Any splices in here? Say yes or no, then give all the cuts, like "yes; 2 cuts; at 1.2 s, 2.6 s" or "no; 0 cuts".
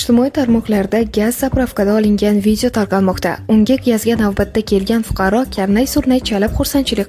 no; 0 cuts